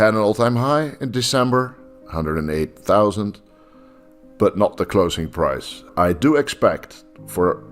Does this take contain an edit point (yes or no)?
yes